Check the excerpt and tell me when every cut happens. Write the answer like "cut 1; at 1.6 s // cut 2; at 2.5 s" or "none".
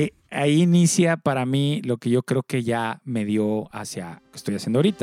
none